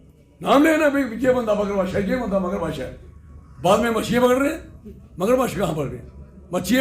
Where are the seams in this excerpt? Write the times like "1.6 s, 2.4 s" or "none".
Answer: none